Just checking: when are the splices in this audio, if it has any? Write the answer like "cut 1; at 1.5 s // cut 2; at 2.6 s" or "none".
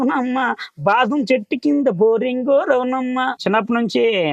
cut 1; at 3.4 s